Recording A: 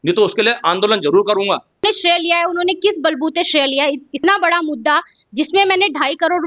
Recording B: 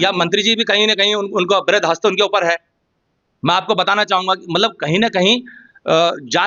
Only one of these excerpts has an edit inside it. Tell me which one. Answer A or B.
A